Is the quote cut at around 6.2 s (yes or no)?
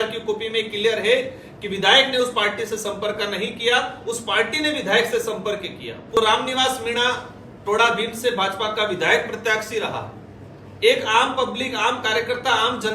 yes